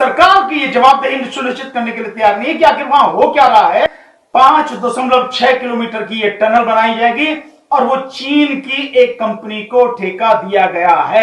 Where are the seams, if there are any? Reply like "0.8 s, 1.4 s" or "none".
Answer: 3.9 s

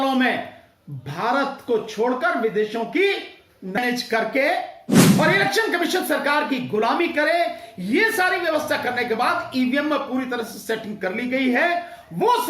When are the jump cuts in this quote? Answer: 3.8 s

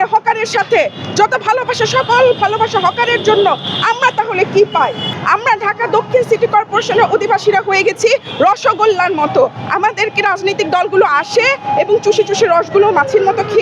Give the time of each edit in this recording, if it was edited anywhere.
5.1 s

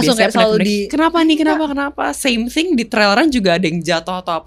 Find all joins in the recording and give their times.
none

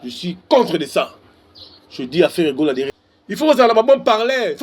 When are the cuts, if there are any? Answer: 2.9 s

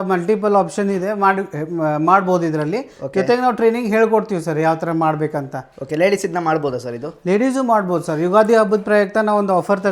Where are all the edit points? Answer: none

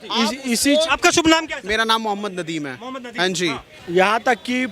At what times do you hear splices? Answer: 3.7 s

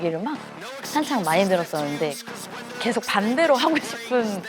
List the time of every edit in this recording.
2.7 s

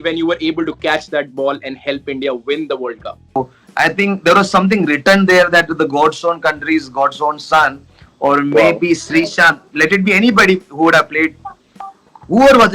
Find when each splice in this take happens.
3.4 s

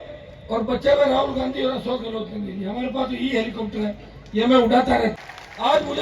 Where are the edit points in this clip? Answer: 5.1 s

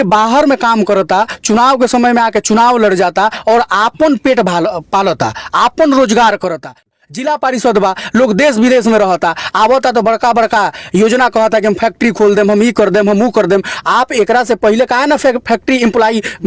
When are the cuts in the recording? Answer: 6.8 s

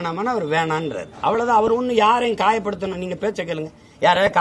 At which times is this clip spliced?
none

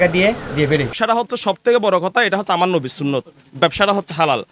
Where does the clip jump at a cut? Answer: 0.9 s

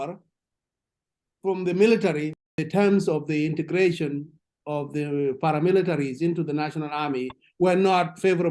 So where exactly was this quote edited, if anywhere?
2.3 s

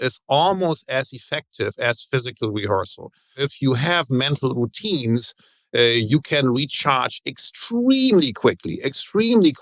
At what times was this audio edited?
3.4 s

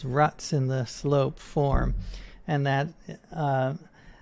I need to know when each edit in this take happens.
none

